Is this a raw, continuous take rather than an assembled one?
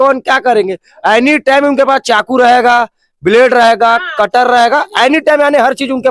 yes; 0 cuts

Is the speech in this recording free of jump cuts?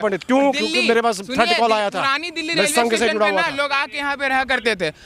yes; 0 cuts

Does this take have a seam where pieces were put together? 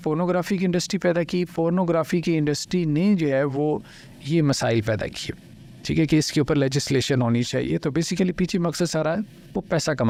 no; 0 cuts

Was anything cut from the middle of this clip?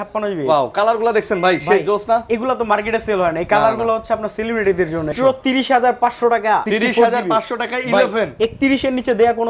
yes; 2 cuts; at 5.1 s, 6.7 s

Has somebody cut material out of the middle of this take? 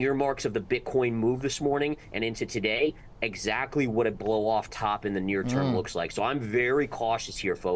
no; 0 cuts

